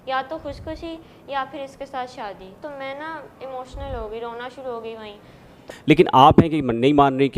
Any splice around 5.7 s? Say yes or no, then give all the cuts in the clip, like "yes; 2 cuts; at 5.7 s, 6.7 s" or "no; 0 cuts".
yes; 2 cuts; at 2.6 s, 5.7 s